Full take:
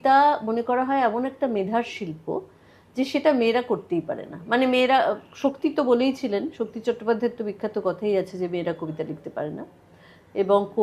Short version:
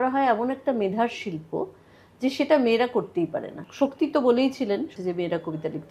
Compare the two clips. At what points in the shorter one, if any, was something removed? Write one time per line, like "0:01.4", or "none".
0:03.6
0:04.9